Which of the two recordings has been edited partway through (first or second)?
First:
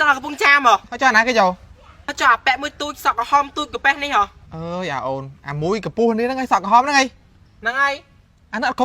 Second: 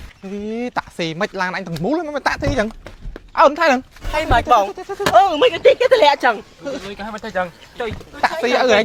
first